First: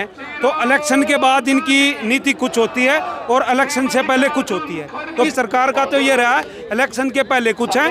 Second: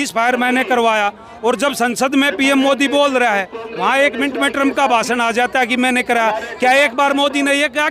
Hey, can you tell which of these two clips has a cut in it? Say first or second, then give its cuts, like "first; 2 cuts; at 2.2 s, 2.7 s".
first; 1 cut; at 5.3 s